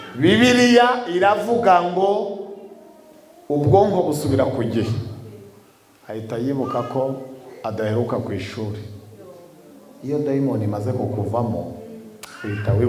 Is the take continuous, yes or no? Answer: yes